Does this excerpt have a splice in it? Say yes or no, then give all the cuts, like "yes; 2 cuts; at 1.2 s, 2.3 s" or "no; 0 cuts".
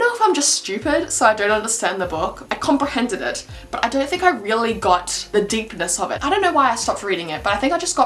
no; 0 cuts